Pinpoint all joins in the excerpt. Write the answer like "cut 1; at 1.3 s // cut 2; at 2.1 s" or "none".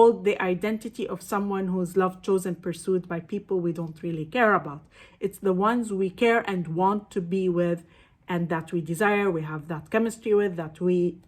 none